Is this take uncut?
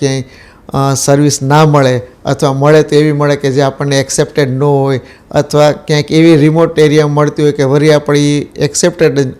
yes; 0 cuts

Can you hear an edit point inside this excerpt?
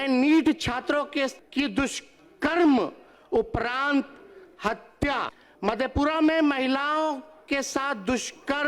yes; 2 cuts; at 1.4 s, 5.4 s

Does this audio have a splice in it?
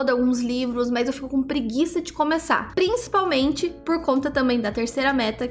no; 0 cuts

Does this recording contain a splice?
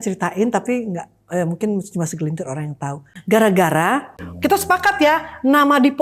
yes; 2 cuts; at 3.1 s, 4.3 s

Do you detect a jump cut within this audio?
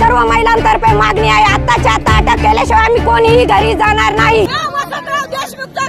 yes; 1 cut; at 4.5 s

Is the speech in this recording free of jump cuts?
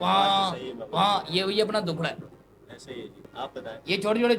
no; 1 cut; at 3.3 s

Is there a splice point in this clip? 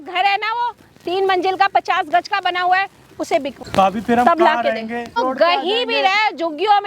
yes; 2 cuts; at 3.5 s, 5.2 s

